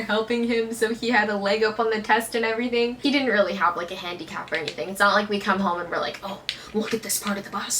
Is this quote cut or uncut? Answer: cut